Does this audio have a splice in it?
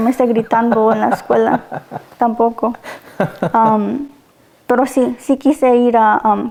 no; 0 cuts

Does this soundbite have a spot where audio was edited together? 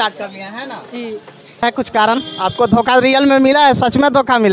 yes; 1 cut; at 1.6 s

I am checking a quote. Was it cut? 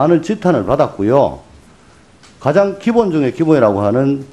yes; 1 cut; at 1.6 s

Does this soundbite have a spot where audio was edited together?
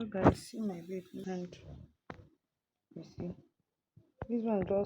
yes; 1 cut; at 1.2 s

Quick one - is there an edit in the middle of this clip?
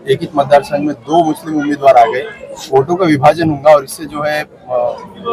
no; 0 cuts

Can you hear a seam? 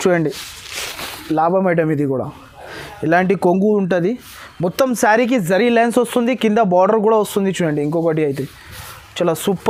no; 0 cuts

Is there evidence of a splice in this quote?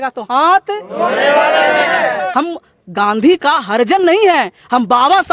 yes; 1 cut; at 2.3 s

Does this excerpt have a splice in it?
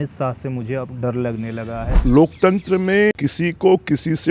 yes; 2 cuts; at 1.9 s, 3.2 s

